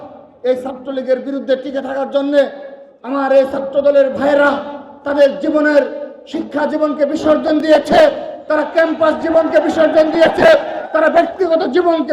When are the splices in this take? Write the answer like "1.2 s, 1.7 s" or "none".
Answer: none